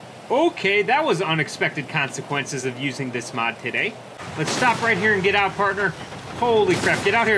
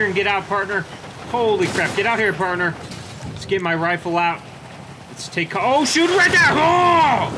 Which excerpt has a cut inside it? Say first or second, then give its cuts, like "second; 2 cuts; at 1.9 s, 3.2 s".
first; 1 cut; at 4.2 s